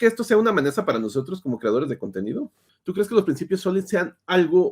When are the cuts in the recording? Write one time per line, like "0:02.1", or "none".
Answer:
0:02.8